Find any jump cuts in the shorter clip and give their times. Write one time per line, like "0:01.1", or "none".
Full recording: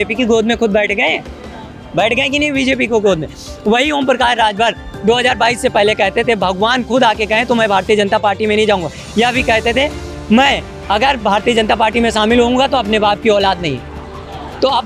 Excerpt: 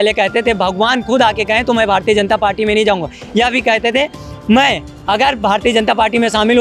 none